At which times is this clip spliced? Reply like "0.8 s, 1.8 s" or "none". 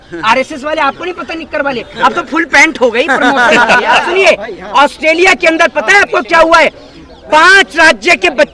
4.0 s